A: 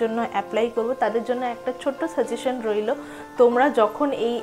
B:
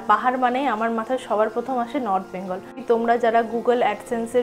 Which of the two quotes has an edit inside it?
B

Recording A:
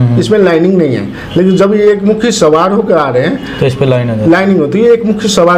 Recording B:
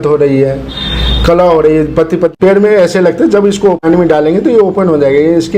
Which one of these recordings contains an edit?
B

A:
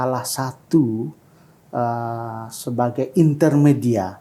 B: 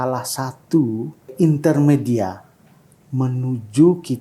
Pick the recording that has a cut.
B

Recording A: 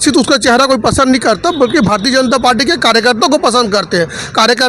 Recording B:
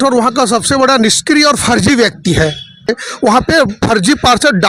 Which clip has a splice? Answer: B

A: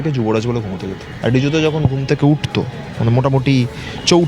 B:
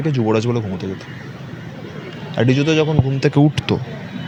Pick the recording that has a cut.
A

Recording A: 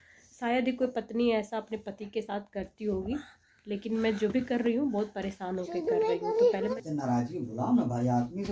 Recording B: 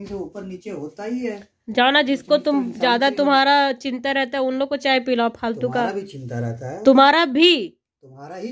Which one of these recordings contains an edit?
A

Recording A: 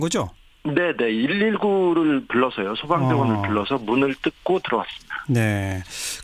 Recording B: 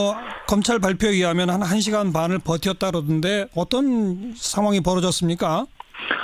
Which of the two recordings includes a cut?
A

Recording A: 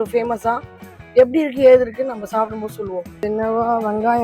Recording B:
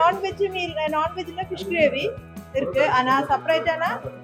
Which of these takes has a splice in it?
A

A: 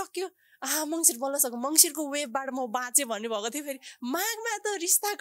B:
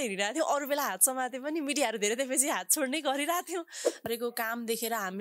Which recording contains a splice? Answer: B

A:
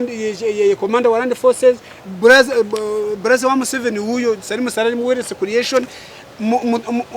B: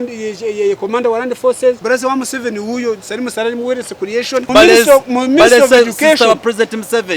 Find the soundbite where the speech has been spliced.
B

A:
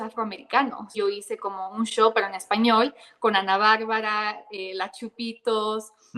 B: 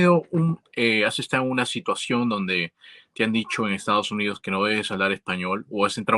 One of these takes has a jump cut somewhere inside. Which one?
A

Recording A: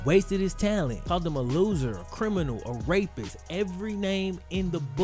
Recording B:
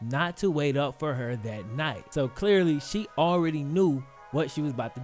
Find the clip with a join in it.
A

